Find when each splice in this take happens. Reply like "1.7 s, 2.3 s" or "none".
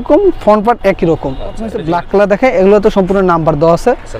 1.8 s